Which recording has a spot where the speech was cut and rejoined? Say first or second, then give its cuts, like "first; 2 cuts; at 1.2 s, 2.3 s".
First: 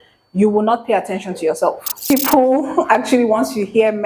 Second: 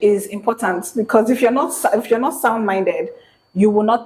first; 1 cut; at 2.1 s